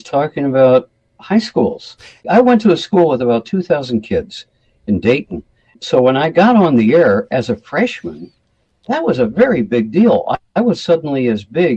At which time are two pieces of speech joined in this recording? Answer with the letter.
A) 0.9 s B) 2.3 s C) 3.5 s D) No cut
B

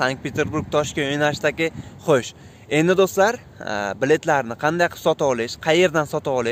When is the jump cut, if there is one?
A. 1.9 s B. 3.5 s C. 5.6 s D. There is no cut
A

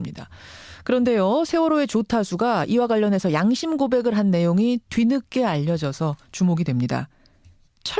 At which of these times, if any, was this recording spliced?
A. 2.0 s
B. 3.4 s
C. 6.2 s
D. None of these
D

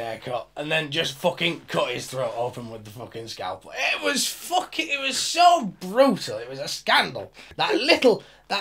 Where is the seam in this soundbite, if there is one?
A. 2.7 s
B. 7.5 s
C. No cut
B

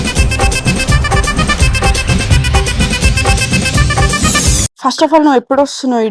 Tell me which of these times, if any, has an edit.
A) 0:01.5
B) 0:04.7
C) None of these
B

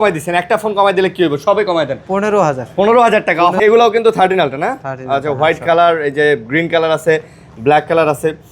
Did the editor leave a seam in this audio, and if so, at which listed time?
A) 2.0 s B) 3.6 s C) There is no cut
B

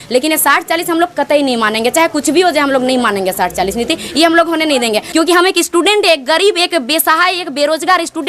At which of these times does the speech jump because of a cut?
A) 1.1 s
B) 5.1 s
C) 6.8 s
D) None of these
B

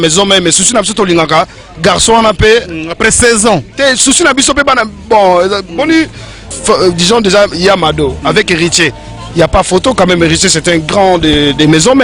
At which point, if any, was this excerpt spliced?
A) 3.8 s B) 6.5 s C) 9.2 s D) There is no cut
B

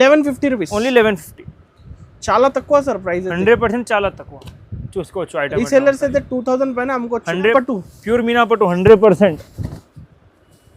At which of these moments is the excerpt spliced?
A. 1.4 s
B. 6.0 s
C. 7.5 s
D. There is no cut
C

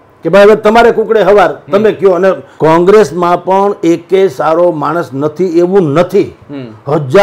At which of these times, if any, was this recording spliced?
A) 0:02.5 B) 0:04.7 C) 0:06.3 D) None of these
A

